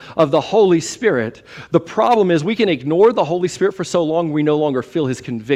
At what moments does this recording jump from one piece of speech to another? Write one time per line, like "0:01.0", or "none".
none